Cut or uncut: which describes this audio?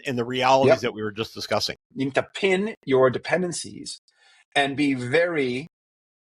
cut